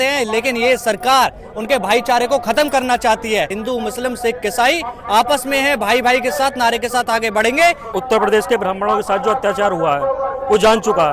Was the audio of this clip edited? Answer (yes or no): yes